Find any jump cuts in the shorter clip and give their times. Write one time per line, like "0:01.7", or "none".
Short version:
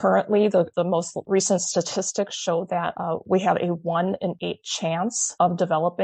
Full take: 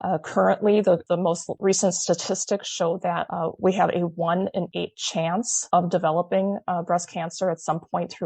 none

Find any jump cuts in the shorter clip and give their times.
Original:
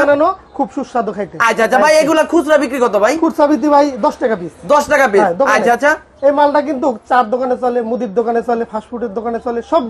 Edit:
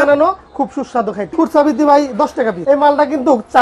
0:01.3
0:02.6

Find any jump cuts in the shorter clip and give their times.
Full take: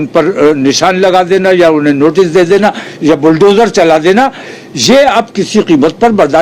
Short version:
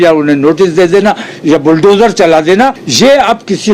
0:02.8

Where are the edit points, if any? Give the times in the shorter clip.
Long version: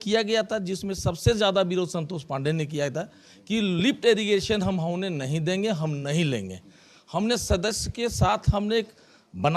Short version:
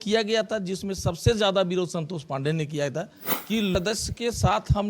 0:03.7

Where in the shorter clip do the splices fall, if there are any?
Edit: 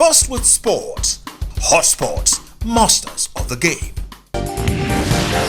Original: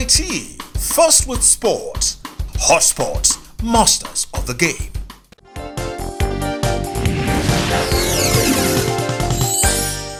0:04.3

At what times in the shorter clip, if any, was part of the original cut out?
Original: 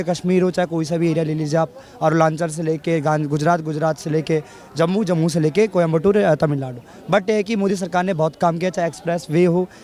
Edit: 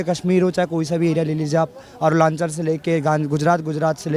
none

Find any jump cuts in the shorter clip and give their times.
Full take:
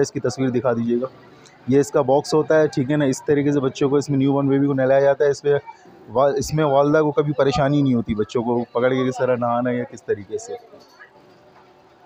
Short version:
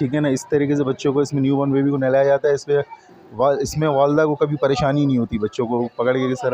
none

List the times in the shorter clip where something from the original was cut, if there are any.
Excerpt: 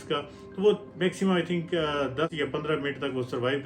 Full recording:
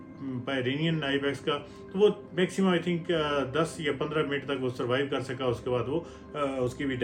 0:02.3

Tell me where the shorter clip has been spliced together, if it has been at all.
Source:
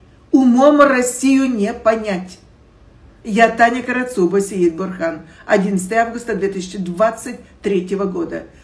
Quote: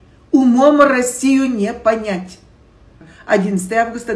0:03.1

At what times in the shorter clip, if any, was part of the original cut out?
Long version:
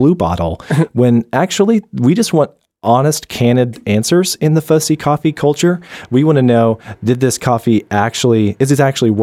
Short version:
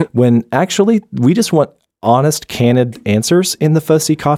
none

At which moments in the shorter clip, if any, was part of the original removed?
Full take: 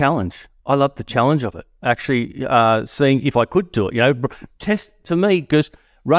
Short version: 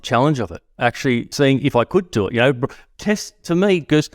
0:01.3

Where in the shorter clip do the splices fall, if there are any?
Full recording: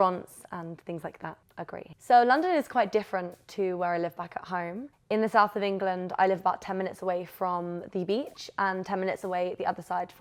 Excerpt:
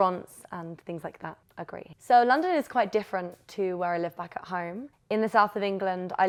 none

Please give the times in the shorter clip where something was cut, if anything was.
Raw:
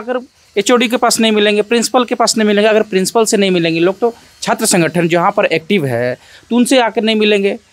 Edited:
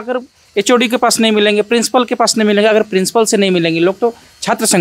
none

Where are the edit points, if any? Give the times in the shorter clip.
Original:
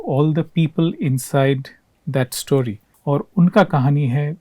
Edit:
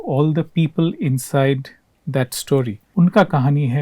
0:02.9

